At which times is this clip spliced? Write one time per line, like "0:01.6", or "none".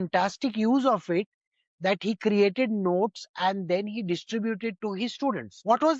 none